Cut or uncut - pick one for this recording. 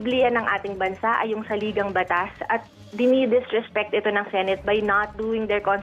uncut